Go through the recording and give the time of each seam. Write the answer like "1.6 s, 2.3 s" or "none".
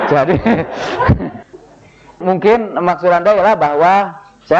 none

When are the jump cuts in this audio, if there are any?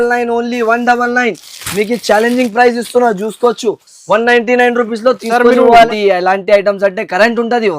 5.9 s

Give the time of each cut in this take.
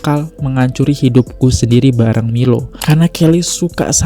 2.7 s

